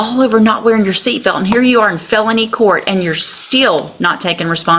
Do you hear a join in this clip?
no; 0 cuts

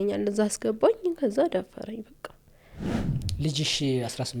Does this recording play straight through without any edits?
no; 1 cut; at 3.1 s

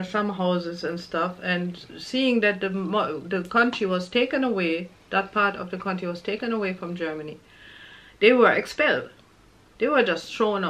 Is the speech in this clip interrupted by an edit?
no; 0 cuts

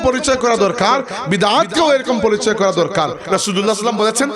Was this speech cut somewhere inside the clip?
yes; 1 cut; at 3.2 s

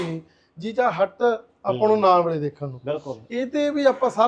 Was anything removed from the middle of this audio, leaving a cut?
no; 0 cuts

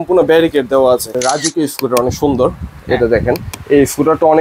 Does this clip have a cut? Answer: yes; 1 cut; at 1.1 s

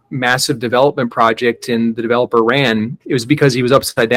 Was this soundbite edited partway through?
yes; 1 cut; at 3.0 s

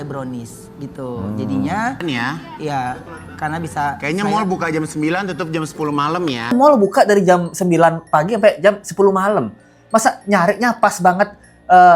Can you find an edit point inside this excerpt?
yes; 2 cuts; at 2.0 s, 6.5 s

